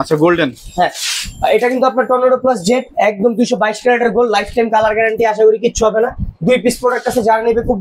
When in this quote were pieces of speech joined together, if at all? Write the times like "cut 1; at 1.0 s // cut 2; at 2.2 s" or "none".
none